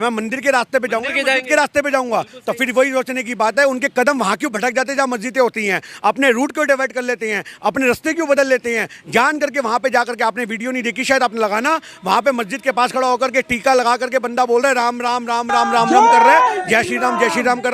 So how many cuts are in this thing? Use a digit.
0